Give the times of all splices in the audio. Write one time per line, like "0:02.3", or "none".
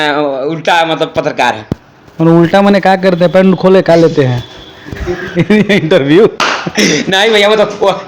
none